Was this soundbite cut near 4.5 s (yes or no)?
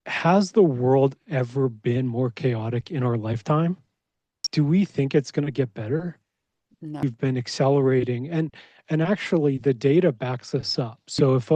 yes